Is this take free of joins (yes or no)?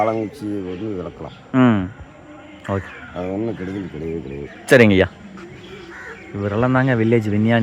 no